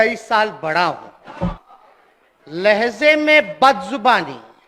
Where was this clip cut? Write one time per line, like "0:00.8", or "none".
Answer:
0:01.6